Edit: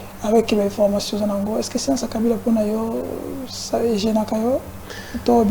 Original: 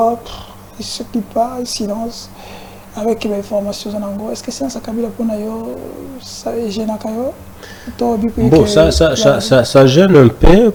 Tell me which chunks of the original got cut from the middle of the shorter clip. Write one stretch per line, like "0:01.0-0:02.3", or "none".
none